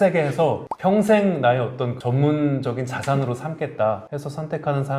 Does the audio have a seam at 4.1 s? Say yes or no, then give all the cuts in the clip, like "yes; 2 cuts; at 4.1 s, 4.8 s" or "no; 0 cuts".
yes; 1 cut; at 4.1 s